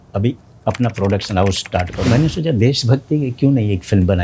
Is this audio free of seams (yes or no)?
no